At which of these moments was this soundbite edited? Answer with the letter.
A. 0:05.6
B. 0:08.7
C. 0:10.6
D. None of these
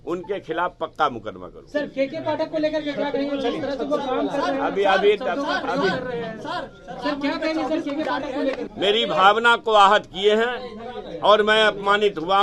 B